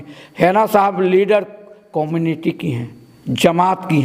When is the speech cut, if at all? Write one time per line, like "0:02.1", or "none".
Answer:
none